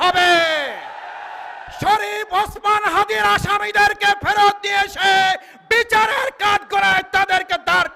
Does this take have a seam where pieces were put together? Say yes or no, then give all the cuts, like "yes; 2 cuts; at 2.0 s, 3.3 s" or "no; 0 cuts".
no; 0 cuts